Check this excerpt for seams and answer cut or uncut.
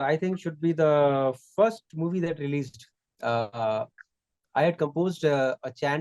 uncut